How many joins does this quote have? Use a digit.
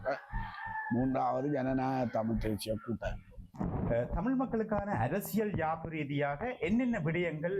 1